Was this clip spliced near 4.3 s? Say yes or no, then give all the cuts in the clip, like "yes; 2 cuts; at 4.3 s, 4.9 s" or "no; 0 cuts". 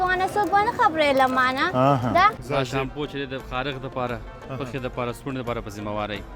no; 1 cut; at 2.4 s